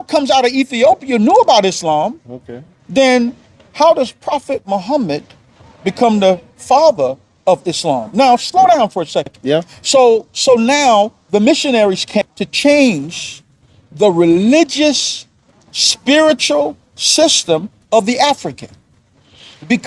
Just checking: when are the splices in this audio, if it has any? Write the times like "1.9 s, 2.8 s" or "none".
9.4 s, 12.1 s